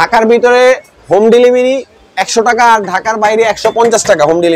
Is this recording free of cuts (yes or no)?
yes